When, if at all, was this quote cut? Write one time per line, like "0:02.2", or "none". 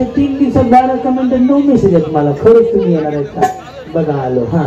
none